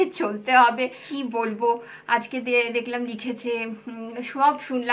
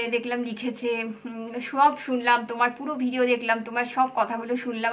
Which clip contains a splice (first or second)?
first